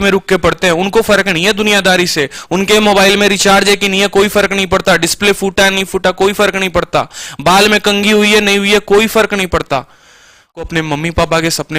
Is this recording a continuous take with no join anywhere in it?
no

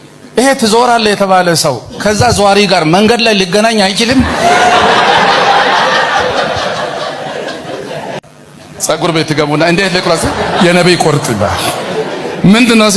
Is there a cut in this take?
yes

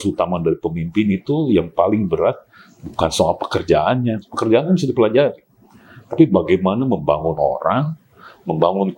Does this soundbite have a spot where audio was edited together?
no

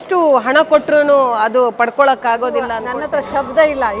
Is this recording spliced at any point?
yes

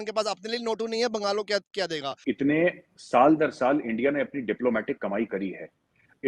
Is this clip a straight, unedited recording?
no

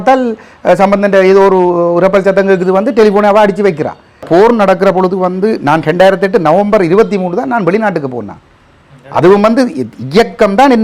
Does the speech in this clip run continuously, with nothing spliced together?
no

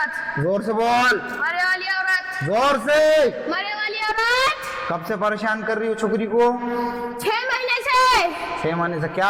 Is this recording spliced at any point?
no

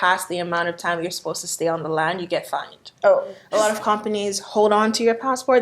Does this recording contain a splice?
yes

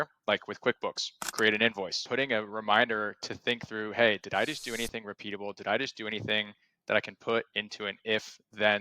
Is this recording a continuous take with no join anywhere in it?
no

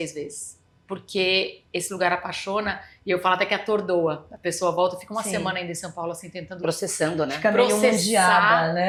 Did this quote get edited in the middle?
no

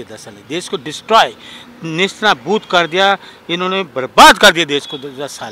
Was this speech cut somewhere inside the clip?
no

